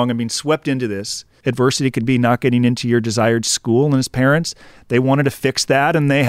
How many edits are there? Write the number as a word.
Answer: one